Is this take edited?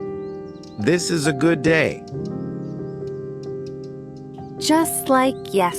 yes; 3 cuts; at 0.8 s, 2.0 s, 4.7 s

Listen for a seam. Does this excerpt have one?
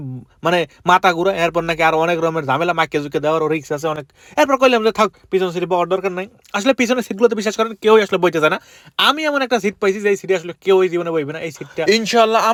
no; 0 cuts

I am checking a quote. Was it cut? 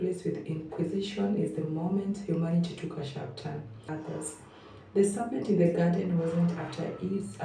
yes; 1 cut; at 3.9 s

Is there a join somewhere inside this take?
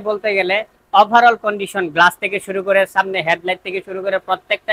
no; 0 cuts

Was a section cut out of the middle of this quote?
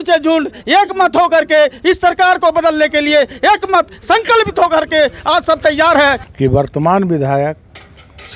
yes; 1 cut; at 6.3 s

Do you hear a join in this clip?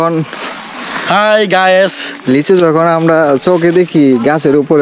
no; 0 cuts

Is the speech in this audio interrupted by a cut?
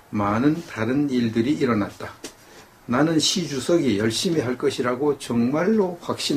yes; 1 cut; at 4.5 s

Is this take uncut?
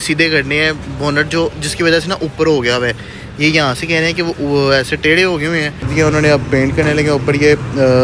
no; 1 cut; at 5.9 s

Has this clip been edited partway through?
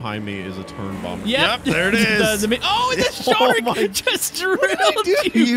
no; 0 cuts

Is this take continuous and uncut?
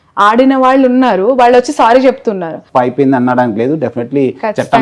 no; 1 cut; at 2.5 s

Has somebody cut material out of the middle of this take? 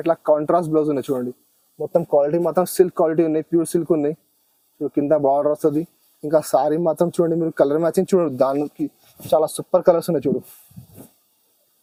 no; 0 cuts

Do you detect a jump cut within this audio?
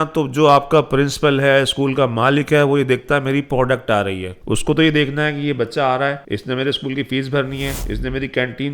yes; 3 cuts; at 4.3 s, 6.2 s, 7.8 s

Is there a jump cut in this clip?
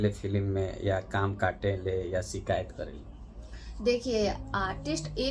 no; 0 cuts

